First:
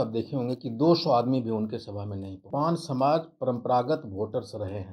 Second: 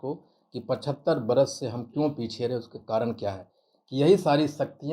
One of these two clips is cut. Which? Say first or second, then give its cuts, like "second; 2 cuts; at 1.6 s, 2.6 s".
first; 1 cut; at 2.5 s